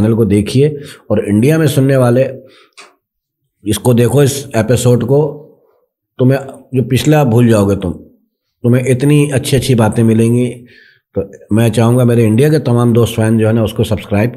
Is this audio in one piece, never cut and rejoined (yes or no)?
yes